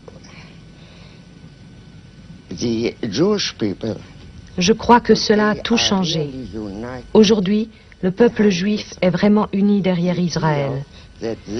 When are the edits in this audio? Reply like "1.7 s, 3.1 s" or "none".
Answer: 4.3 s